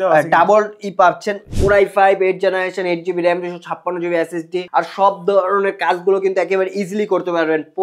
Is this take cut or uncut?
cut